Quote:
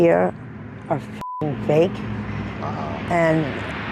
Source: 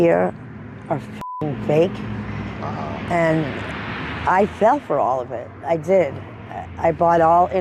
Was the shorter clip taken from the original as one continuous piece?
yes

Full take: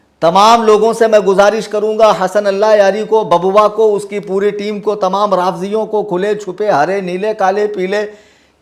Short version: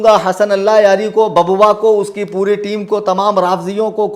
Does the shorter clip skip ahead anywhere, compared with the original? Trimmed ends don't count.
no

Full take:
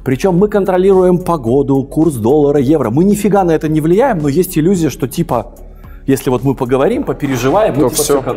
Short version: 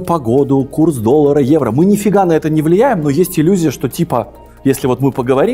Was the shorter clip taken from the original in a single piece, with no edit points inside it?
no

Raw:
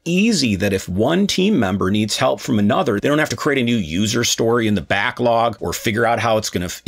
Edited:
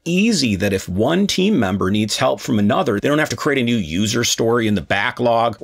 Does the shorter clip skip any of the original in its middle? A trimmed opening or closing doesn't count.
no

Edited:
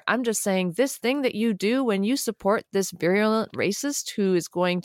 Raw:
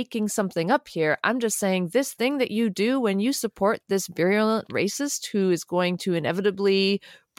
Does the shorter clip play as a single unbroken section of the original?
yes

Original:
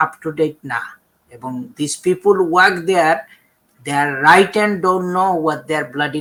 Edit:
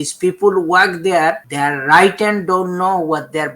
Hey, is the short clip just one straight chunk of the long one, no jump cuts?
no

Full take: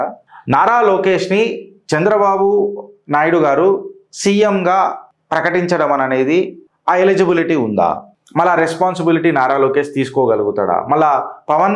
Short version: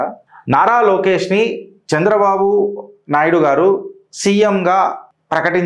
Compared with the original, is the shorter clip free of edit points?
yes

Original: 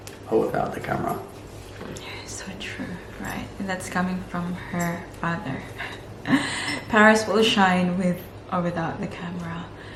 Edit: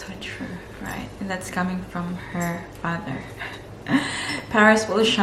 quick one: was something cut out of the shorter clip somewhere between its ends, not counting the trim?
no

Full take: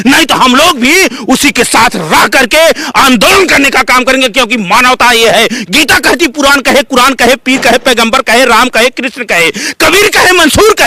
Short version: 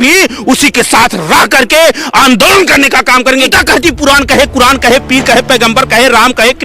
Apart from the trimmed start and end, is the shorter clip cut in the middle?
yes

